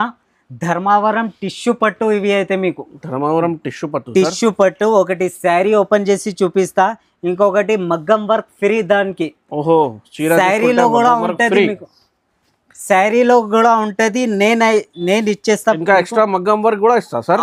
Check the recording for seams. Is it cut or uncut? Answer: uncut